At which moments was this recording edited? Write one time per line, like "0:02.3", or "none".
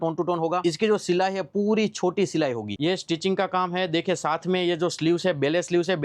0:02.8